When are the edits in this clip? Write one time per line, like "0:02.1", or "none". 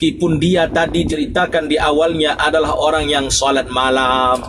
0:01.1